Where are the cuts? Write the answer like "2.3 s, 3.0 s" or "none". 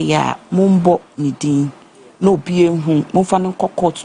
none